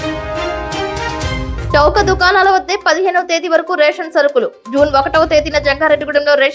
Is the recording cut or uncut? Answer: cut